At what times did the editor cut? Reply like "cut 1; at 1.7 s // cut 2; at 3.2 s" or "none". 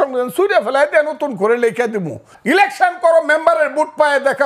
cut 1; at 2.3 s

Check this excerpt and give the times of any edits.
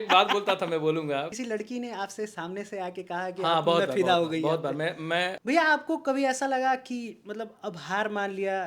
cut 1; at 1.3 s // cut 2; at 5.4 s

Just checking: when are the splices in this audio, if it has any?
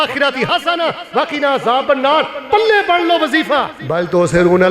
cut 1; at 3.8 s

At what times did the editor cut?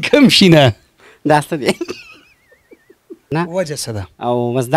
cut 1; at 3.3 s

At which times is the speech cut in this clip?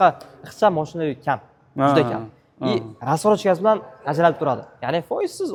none

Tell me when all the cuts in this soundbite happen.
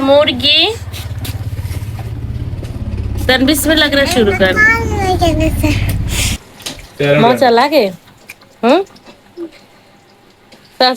cut 1; at 7.2 s

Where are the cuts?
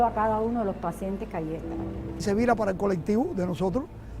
cut 1; at 2.2 s

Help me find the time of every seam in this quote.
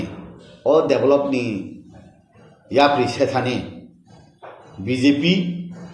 none

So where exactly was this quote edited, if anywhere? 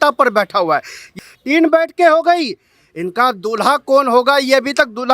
cut 1; at 1.1 s

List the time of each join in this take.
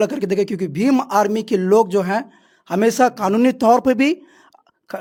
none

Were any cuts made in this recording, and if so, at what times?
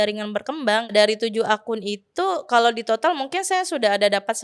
cut 1; at 0.9 s

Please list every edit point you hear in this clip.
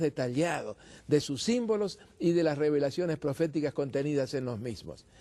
cut 1; at 1.6 s

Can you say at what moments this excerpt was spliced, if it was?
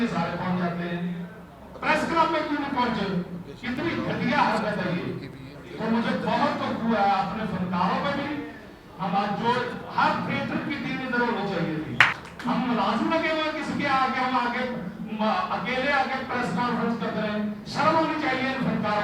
cut 1; at 12.2 s

